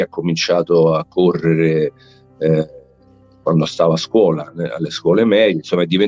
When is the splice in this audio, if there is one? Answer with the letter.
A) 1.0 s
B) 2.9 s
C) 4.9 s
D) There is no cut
D